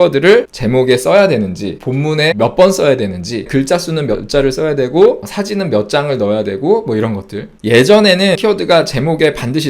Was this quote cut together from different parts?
yes; 4 cuts; at 2.2 s, 3.5 s, 7.6 s, 8.4 s

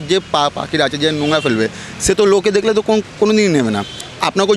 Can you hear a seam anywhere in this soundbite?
no; 0 cuts

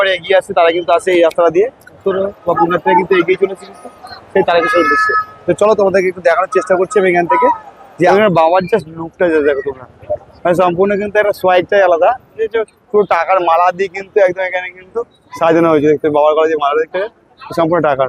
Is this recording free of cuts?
no; 3 cuts; at 2.0 s, 8.1 s, 12.3 s

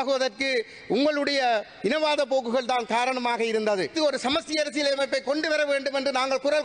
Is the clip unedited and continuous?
no; 1 cut; at 3.9 s

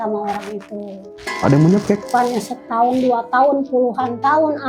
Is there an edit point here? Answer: yes; 1 cut; at 2.1 s

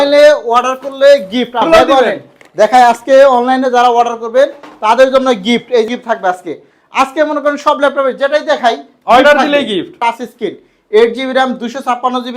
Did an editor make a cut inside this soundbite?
yes; 3 cuts; at 1.6 s, 5.9 s, 9.9 s

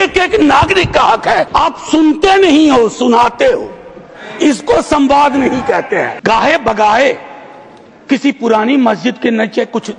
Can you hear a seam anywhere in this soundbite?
yes; 2 cuts; at 1.5 s, 6.1 s

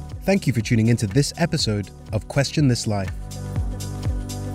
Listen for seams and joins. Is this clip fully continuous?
no; 1 cut; at 3.2 s

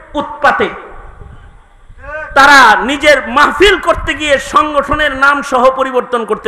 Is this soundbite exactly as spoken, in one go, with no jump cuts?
yes; 0 cuts

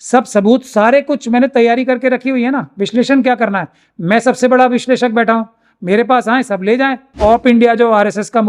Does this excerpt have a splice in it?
yes; 1 cut; at 7.2 s

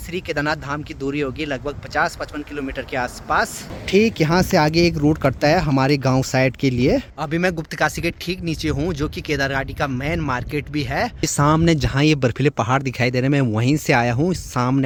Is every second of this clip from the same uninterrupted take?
yes; 0 cuts

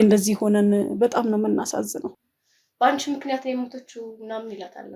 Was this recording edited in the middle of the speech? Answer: yes; 1 cut; at 2.2 s

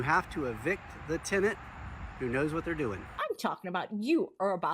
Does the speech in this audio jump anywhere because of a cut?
yes; 1 cut; at 3.1 s

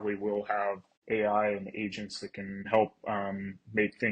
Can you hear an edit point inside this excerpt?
yes; 2 cuts; at 0.9 s, 2.7 s

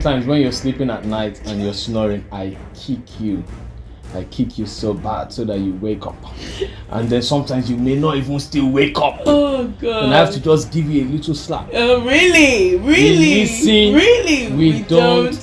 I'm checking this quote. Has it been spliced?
no; 0 cuts

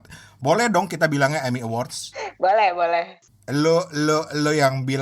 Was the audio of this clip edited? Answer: yes; 1 cut; at 3.2 s

